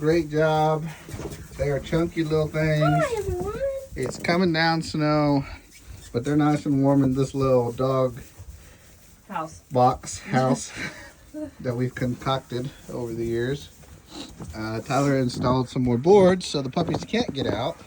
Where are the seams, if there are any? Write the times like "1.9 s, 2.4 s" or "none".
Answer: none